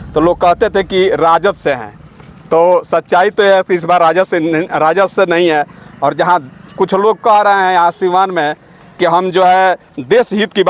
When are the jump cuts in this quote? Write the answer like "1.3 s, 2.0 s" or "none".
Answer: none